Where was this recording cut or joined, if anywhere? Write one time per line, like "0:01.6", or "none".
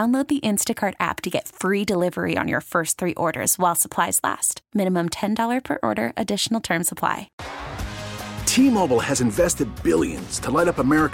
0:07.4

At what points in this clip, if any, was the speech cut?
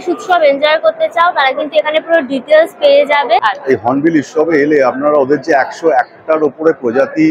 0:03.4

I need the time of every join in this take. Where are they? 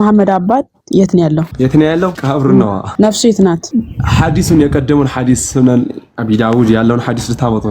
0:01.5
0:02.2
0:02.8
0:03.6

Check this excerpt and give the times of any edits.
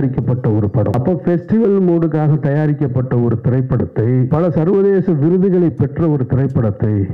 0:00.9
0:04.3

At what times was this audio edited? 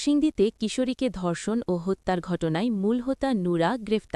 none

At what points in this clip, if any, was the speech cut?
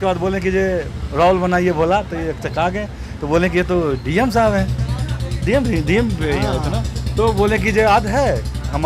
none

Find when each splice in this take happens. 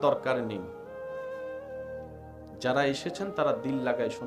0:00.8
0:02.6

